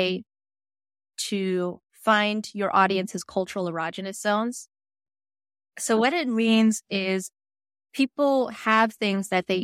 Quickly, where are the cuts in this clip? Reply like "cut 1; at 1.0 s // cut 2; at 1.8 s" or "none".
cut 1; at 5.2 s